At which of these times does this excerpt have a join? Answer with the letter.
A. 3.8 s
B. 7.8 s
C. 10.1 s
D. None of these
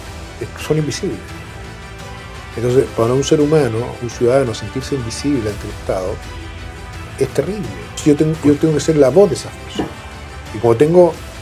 B